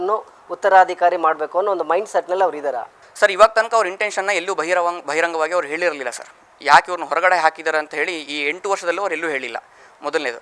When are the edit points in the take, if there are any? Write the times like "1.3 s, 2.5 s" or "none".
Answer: none